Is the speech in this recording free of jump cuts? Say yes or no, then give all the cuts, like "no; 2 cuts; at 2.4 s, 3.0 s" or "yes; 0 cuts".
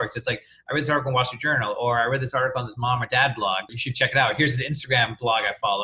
no; 1 cut; at 3.8 s